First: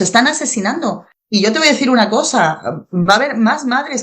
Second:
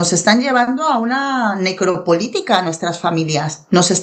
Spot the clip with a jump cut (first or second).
first